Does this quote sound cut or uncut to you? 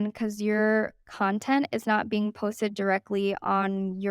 uncut